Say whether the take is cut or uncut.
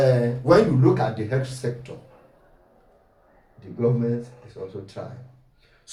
uncut